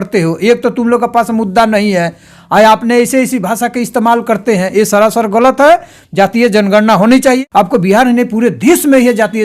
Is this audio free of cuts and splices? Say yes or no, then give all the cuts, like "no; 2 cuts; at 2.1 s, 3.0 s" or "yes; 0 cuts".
no; 1 cut; at 7.4 s